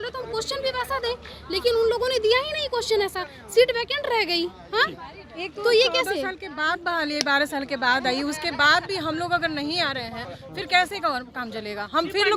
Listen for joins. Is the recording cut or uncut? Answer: uncut